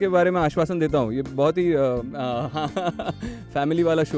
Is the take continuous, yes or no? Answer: yes